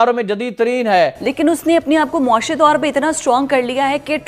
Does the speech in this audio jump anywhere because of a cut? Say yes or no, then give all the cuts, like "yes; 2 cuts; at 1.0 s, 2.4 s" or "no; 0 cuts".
yes; 1 cut; at 1.2 s